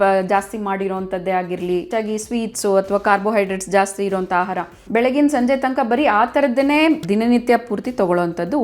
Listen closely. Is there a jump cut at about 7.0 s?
yes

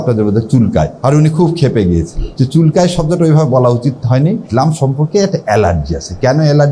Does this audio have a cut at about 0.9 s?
yes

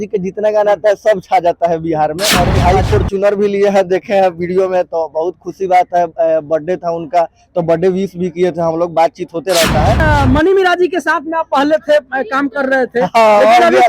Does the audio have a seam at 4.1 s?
no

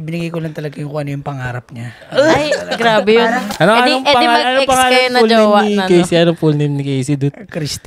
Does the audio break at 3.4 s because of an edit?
yes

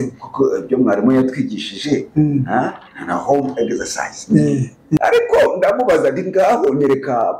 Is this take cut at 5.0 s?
yes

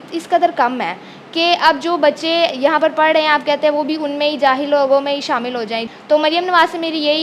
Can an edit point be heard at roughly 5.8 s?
yes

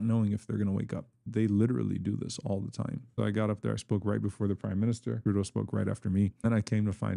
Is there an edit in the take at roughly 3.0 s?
yes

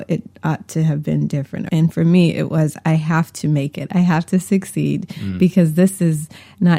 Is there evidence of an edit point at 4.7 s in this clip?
no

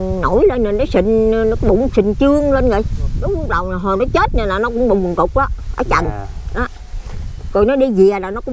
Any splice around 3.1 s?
yes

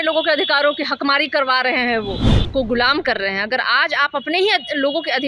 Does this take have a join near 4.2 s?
no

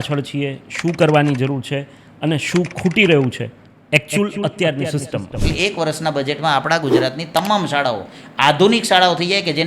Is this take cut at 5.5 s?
yes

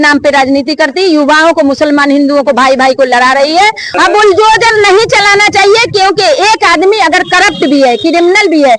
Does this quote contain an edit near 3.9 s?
yes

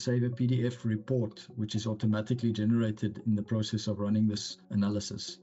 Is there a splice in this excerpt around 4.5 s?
yes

